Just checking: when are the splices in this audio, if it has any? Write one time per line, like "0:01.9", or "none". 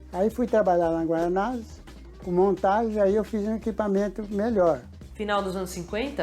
0:04.9